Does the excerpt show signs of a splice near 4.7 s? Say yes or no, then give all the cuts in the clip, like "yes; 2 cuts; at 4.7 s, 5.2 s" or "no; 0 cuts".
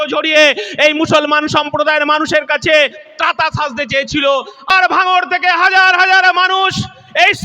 yes; 1 cut; at 4.7 s